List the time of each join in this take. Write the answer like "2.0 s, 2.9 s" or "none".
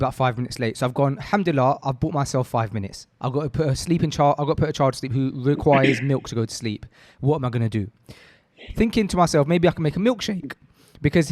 3.1 s